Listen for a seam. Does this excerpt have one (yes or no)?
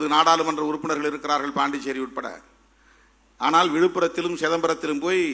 no